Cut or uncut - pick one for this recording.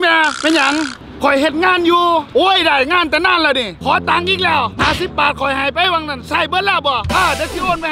cut